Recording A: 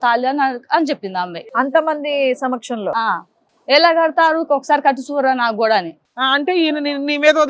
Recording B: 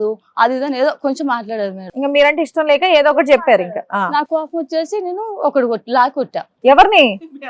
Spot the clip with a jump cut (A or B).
A